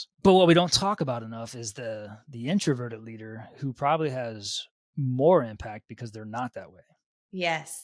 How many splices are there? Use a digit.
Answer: 0